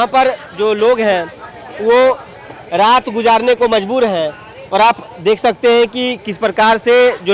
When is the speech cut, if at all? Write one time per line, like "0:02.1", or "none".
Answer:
none